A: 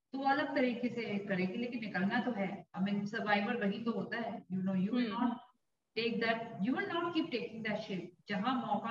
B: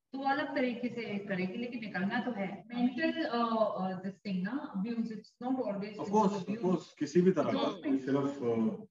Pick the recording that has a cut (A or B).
B